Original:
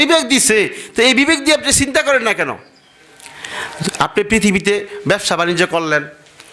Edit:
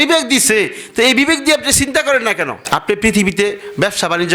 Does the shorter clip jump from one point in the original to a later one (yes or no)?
yes